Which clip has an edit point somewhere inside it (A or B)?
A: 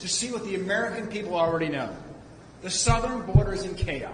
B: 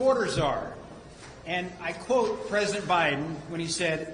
B